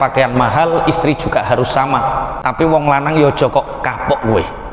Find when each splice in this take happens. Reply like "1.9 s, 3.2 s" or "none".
2.3 s